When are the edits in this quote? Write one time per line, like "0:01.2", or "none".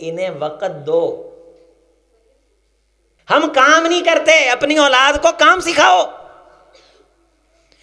0:03.2